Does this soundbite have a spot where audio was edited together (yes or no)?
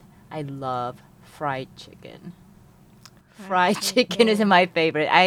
no